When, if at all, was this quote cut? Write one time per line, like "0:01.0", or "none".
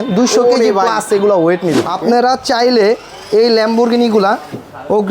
0:01.9